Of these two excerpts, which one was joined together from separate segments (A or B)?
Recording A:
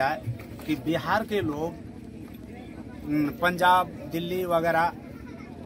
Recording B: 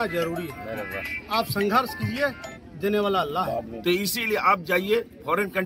B